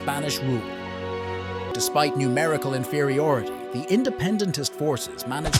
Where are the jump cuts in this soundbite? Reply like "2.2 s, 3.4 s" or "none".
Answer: 1.1 s